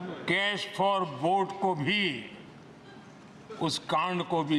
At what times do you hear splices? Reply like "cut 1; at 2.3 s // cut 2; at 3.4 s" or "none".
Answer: none

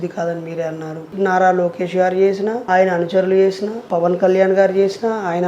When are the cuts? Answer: cut 1; at 1.1 s // cut 2; at 2.6 s // cut 3; at 3.7 s

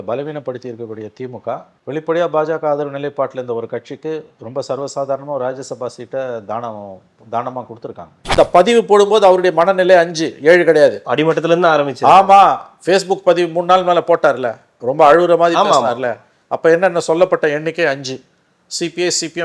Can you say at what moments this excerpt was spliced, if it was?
cut 1; at 8.3 s

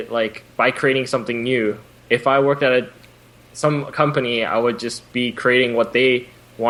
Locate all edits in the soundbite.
none

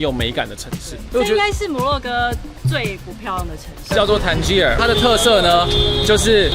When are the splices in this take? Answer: cut 1; at 3.9 s

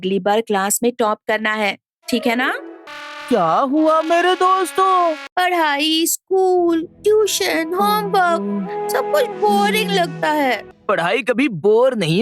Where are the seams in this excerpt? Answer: cut 1; at 2.8 s // cut 2; at 5.2 s // cut 3; at 10.7 s

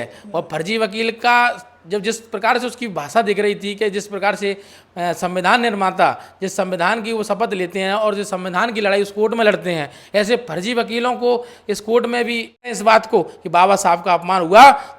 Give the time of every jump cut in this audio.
cut 1; at 12.7 s

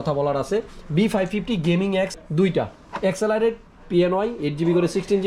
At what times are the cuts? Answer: cut 1; at 2.2 s

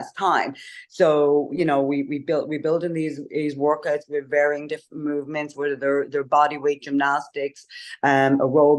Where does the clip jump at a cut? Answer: none

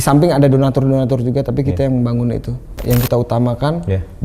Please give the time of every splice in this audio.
cut 1; at 2.7 s

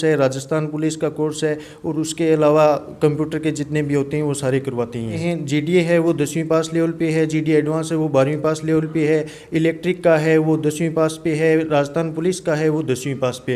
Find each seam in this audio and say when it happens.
cut 1; at 5.2 s

